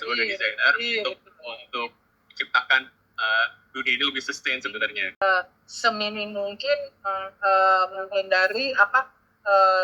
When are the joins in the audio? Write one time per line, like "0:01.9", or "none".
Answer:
0:05.2